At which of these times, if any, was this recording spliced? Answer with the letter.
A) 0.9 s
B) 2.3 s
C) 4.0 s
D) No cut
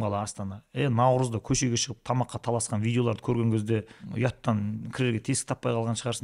C